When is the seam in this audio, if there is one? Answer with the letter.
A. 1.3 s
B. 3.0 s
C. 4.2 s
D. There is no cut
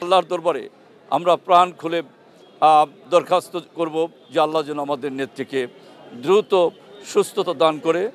D